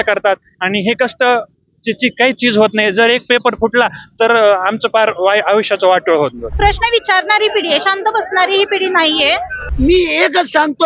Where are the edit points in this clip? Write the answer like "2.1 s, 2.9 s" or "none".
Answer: 6.4 s, 9.6 s